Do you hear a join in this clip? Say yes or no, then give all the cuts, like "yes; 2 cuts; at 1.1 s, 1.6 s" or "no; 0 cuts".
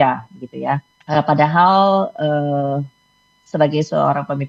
yes; 1 cut; at 0.9 s